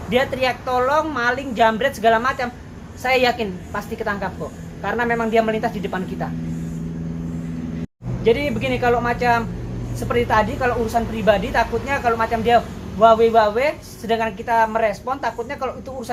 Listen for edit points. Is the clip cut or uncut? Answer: uncut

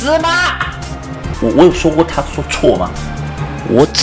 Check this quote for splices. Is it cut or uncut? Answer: cut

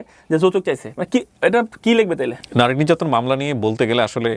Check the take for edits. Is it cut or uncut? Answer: uncut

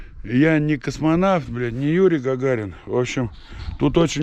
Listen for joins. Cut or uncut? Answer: uncut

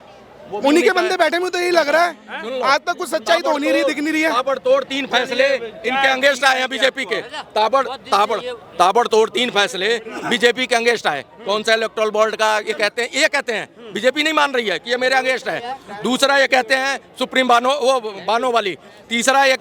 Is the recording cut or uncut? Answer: uncut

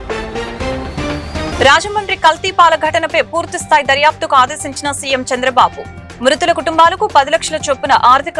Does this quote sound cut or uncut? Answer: cut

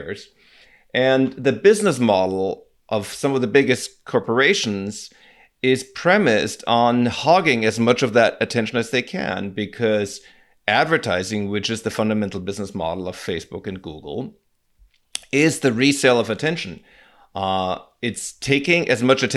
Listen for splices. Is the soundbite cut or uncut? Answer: uncut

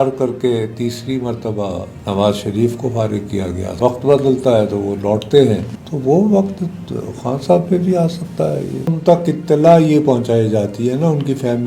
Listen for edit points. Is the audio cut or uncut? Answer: cut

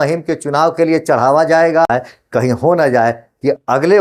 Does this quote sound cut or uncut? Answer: cut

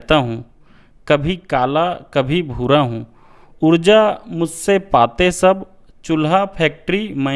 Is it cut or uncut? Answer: uncut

